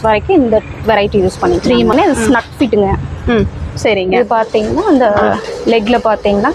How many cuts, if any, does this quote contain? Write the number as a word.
one